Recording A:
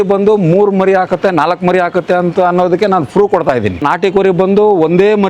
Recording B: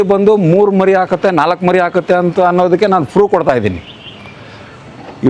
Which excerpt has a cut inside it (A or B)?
A